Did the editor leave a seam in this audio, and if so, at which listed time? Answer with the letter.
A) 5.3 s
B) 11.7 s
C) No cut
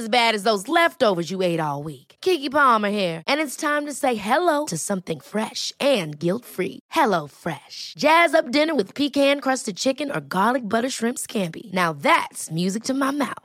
C